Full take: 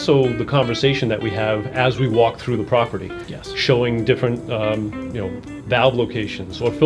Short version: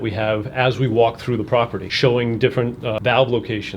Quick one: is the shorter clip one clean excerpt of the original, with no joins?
no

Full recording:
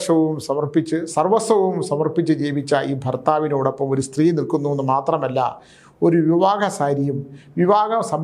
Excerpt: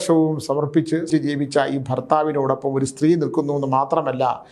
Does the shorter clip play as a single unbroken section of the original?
no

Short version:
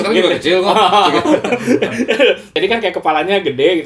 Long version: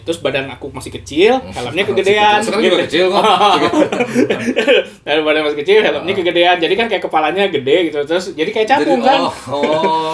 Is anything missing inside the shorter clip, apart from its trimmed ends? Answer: yes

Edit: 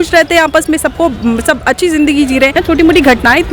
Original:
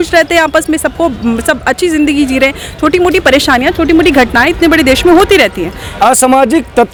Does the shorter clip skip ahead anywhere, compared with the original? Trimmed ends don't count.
yes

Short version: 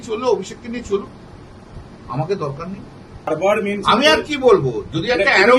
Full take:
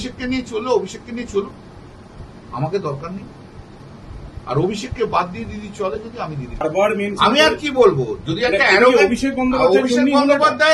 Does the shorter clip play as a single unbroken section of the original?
no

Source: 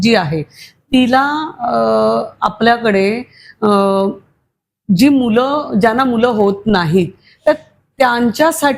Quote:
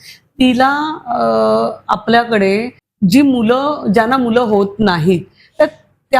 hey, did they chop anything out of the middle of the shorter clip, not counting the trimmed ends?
yes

